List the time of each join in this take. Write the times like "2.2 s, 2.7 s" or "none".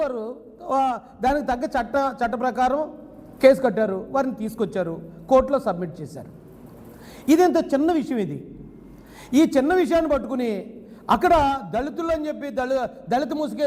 none